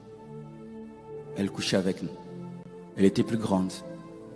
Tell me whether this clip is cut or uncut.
cut